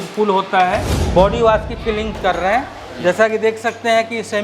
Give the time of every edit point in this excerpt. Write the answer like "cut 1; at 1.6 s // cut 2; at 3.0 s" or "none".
cut 1; at 0.9 s